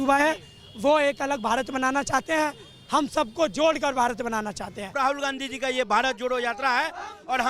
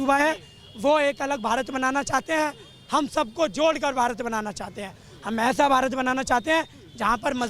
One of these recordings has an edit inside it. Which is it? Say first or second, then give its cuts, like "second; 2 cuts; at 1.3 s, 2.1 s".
first; 1 cut; at 4.9 s